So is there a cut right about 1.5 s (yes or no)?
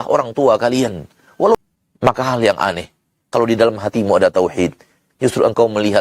yes